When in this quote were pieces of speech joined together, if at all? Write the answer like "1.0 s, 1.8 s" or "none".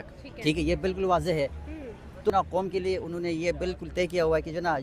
2.3 s